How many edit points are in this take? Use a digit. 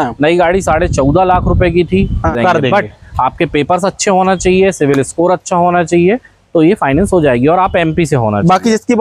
1